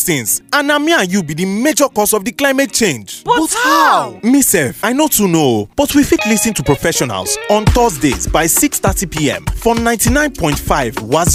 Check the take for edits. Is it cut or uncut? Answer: uncut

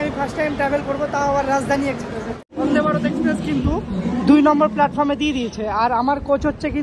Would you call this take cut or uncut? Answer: cut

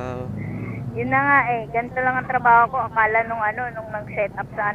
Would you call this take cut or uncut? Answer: uncut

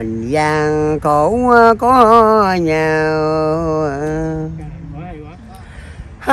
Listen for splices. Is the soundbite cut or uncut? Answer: cut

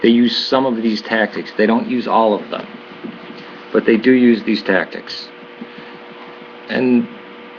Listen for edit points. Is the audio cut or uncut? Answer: cut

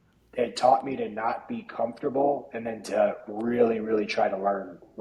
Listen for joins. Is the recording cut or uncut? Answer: uncut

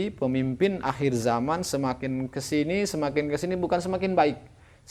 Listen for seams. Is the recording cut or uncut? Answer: uncut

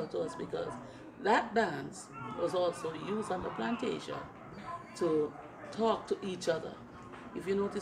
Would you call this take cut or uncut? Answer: uncut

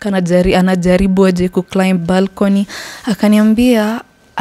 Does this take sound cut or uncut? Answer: uncut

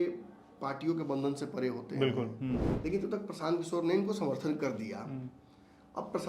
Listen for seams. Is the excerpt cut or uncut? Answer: cut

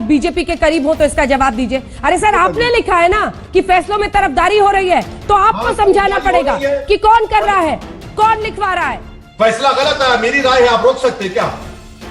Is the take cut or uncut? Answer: uncut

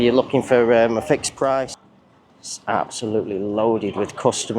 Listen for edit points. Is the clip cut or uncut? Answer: cut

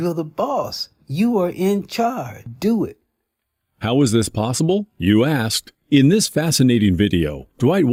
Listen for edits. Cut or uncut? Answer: uncut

